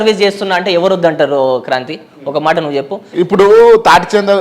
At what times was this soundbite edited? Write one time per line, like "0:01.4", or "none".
0:03.0